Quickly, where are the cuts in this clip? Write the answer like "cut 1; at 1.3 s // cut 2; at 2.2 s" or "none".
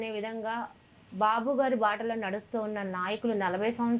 none